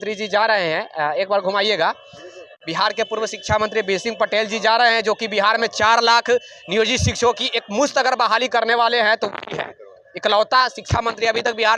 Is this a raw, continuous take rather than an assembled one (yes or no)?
yes